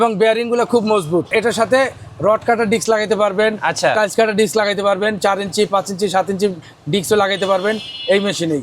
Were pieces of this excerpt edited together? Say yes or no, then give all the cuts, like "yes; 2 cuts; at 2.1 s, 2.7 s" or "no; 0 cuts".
yes; 1 cut; at 1.3 s